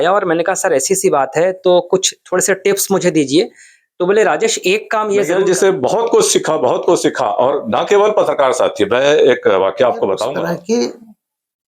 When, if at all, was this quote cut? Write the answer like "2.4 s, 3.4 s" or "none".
5.3 s, 10.4 s